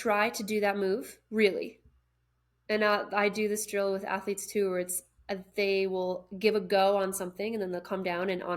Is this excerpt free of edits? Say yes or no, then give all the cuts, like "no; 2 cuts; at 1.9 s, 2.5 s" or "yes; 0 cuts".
yes; 0 cuts